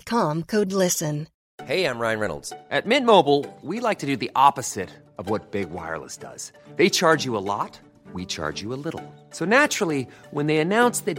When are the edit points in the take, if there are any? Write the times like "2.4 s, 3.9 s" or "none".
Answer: 1.4 s